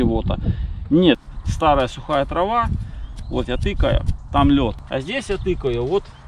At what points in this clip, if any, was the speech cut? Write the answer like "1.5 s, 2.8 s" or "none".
1.2 s, 4.8 s